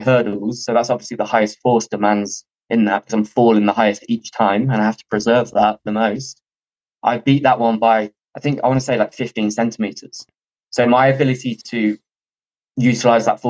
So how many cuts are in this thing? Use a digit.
0